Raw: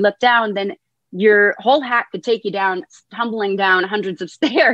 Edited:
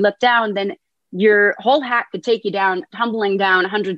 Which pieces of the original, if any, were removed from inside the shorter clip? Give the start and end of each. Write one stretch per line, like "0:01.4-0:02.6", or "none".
0:02.9-0:03.1

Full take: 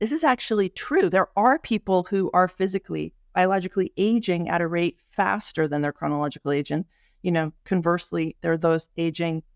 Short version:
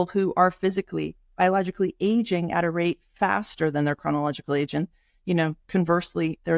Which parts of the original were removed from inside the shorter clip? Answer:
none

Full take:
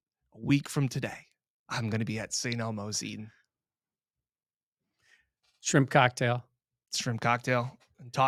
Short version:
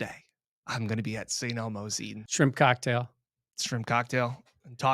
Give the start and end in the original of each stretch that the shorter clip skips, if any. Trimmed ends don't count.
0:03.2-0:05.6

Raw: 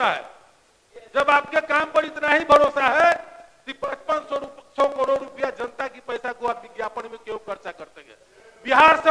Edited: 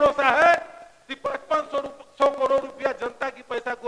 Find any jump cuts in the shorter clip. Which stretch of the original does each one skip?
none

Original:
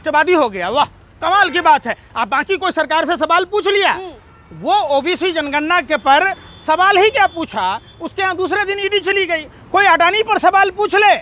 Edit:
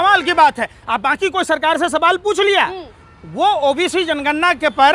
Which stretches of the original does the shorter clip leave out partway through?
none

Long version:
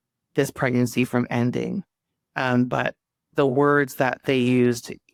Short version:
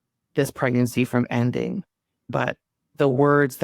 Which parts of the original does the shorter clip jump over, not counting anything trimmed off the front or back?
0:02.3-0:02.7

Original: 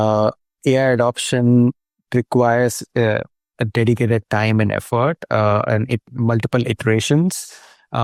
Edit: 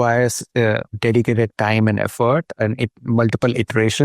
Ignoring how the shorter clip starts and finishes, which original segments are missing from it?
0:03.3-0:03.6
0:05.3-0:05.7

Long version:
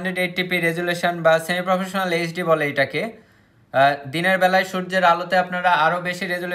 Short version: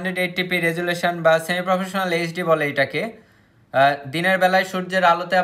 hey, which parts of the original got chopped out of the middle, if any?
none

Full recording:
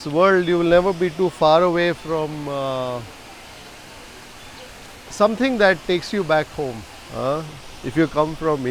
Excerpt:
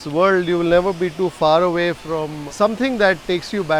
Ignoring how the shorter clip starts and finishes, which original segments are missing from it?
0:02.4-0:05.0

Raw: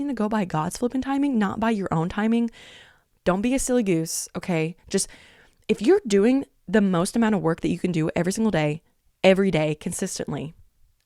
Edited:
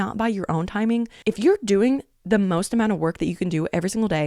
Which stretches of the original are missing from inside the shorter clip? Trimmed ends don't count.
0:02.6-0:05.6

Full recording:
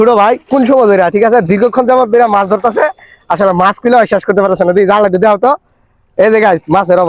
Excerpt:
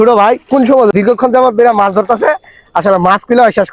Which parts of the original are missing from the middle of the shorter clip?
0:00.9-0:01.5

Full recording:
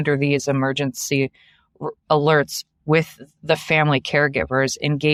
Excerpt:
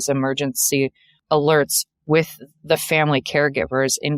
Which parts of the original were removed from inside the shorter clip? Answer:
0:01.5-0:01.9

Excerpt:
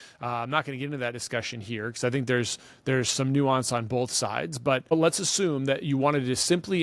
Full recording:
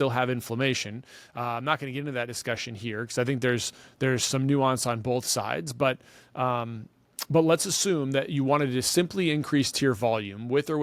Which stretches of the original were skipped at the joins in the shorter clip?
0:06.1-0:07.4

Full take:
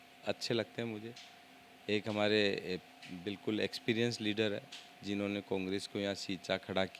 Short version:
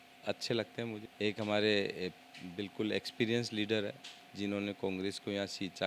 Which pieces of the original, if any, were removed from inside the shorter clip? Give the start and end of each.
0:01.1-0:01.7

